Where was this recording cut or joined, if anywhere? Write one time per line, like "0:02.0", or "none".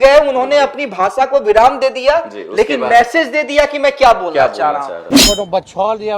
0:05.0